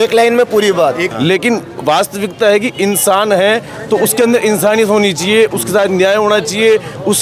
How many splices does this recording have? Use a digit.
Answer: 1